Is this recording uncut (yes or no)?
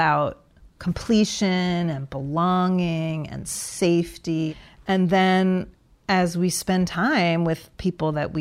no